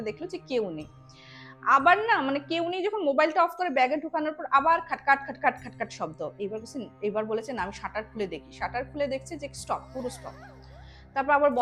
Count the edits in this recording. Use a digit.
0